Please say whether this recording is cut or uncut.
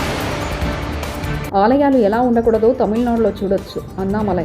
uncut